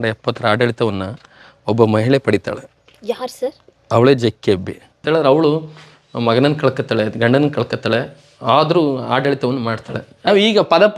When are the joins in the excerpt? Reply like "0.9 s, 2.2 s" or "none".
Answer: 5.0 s, 10.2 s